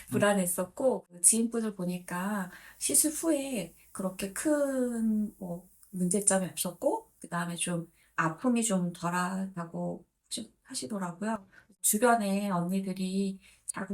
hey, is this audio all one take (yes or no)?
no